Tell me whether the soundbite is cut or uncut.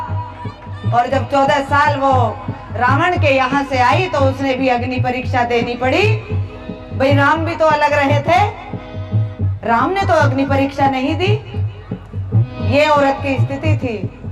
uncut